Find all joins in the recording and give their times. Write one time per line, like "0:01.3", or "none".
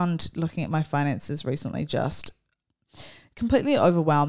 none